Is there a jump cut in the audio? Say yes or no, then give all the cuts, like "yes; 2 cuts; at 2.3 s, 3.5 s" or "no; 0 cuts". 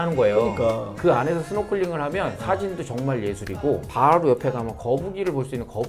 no; 0 cuts